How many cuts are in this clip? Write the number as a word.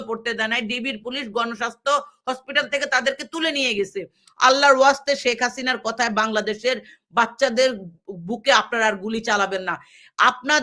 one